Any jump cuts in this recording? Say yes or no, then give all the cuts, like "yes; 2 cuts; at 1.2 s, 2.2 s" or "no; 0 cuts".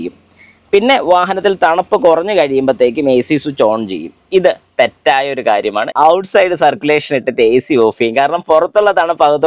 yes; 1 cut; at 5.9 s